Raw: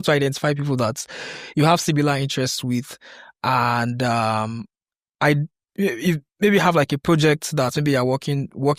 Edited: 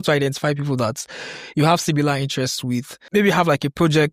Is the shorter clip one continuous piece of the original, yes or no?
no